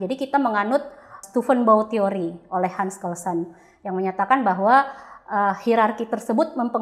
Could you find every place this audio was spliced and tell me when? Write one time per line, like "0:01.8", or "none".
0:01.2